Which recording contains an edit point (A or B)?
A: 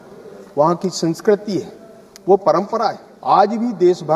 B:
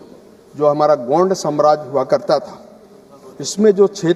A